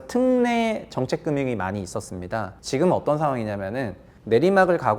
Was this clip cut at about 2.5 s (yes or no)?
yes